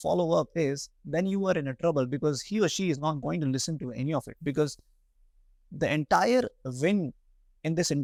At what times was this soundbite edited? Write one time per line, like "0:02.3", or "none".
none